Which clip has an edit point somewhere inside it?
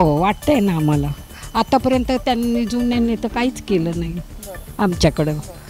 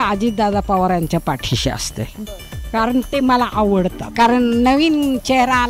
second; 1 cut; at 4.0 s

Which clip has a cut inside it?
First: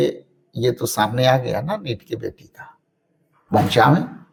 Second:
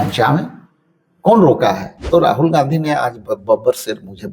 second; 1 cut; at 1.9 s

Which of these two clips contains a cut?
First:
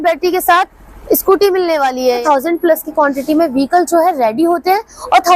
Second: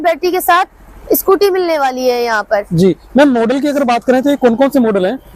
first; 1 cut; at 2.2 s

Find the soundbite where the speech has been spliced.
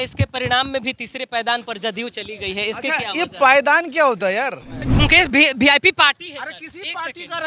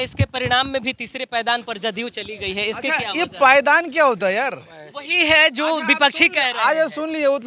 first; 1 cut; at 4.8 s

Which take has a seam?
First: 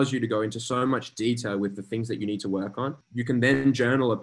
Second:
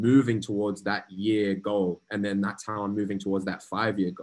first; 1 cut; at 3.0 s

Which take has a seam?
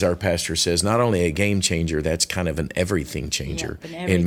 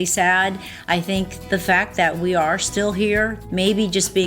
second; 2 cuts; at 1.3 s, 3.3 s

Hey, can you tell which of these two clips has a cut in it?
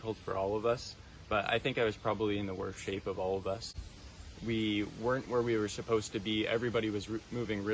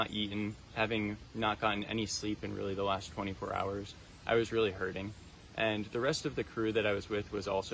first; 1 cut; at 3.7 s

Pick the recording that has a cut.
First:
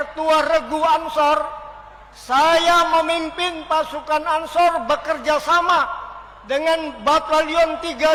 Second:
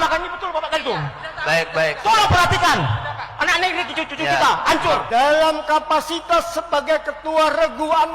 second; 1 cut; at 5.0 s

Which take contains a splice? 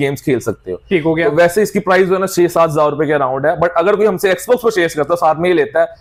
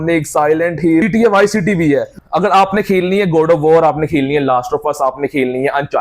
second; 2 cuts; at 1.0 s, 2.1 s

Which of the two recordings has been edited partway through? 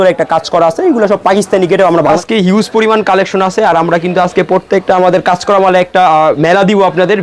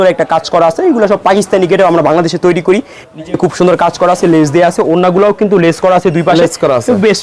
first; 1 cut; at 2.2 s

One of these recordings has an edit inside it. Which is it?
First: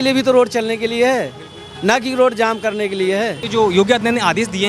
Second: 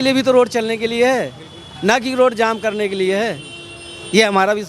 first; 1 cut; at 3.4 s

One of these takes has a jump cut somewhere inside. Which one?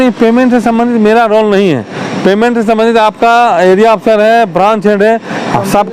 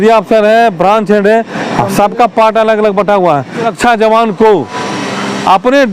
second; 1 cut; at 3.7 s

